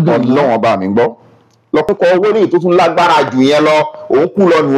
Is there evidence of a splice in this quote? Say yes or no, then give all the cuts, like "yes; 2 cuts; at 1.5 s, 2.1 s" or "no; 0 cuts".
yes; 1 cut; at 1.9 s